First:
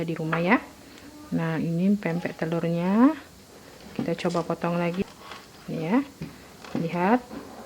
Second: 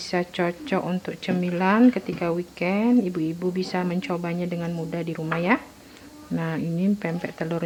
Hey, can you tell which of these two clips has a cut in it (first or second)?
first